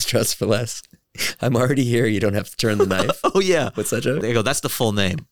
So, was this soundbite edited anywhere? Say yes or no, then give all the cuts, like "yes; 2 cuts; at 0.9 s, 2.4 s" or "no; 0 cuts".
yes; 1 cut; at 4.2 s